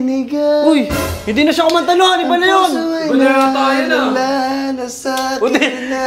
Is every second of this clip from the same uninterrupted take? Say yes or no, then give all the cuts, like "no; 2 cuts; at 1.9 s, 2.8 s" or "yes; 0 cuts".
yes; 0 cuts